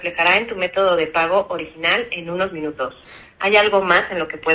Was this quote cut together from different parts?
no; 0 cuts

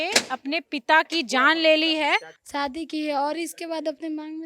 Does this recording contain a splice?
yes; 1 cut; at 2.3 s

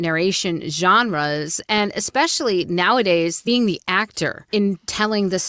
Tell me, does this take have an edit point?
yes; 2 cuts; at 3.4 s, 4.5 s

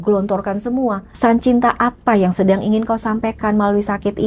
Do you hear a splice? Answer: yes; 1 cut; at 1.1 s

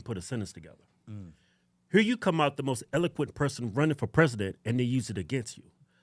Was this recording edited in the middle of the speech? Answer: no; 0 cuts

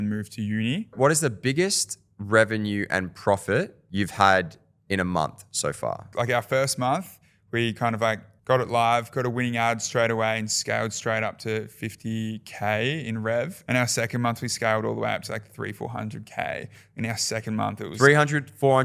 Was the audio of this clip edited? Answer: yes; 3 cuts; at 0.9 s, 6.0 s, 13.6 s

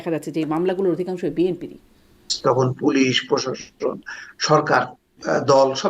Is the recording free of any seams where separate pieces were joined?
no; 1 cut; at 2.2 s

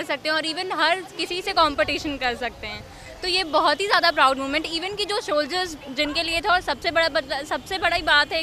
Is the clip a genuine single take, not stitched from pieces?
yes; 0 cuts

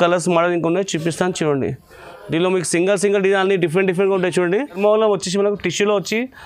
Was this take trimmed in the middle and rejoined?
yes; 1 cut; at 4.8 s

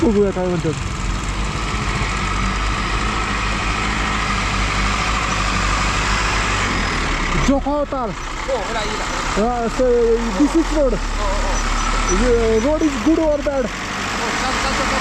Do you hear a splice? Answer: no; 0 cuts

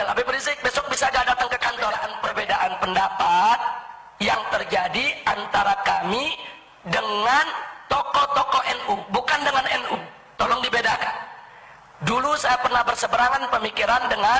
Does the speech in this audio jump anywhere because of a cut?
yes; 1 cut; at 2.1 s

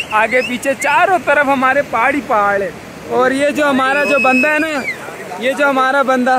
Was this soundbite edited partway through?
no; 0 cuts

